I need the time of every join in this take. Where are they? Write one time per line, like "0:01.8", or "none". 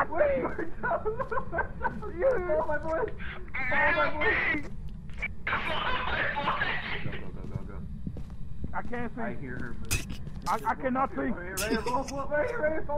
0:07.0

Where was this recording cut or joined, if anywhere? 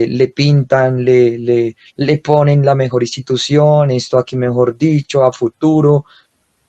none

